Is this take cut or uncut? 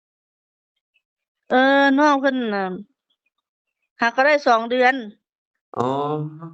uncut